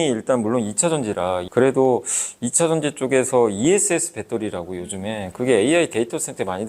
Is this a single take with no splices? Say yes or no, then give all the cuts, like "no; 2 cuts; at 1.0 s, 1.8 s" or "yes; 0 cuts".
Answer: no; 1 cut; at 1.5 s